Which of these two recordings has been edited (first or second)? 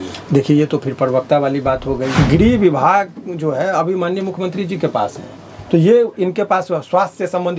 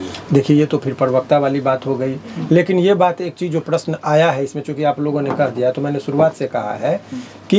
first